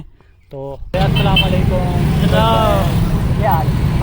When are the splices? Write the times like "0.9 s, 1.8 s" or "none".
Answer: 0.9 s